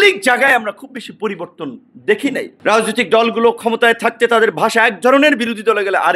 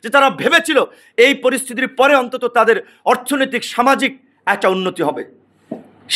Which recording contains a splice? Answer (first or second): first